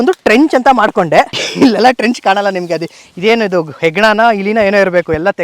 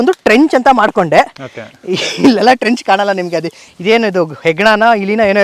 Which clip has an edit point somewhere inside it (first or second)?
first